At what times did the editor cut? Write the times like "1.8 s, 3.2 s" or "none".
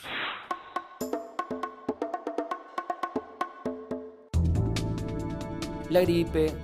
5.5 s